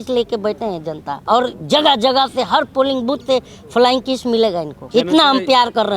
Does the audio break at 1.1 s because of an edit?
yes; 2 cuts; at 1.1 s, 4.8 s

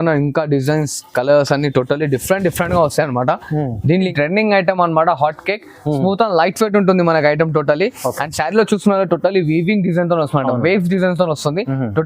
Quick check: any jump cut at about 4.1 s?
yes; 1 cut; at 4.1 s

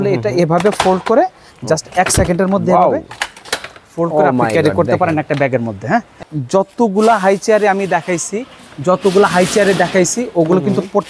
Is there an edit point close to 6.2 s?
yes; 1 cut; at 6.2 s

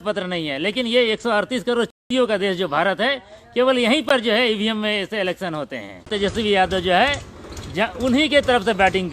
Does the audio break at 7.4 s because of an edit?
no; 1 cut; at 6.0 s

